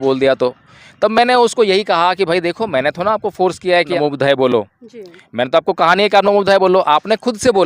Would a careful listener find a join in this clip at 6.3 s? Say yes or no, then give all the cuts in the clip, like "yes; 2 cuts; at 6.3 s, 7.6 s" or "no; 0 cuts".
no; 1 cut; at 3.9 s